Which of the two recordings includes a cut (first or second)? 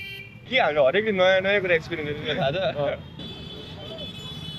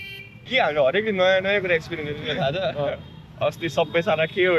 first